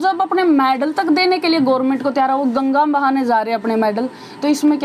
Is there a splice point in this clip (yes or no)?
no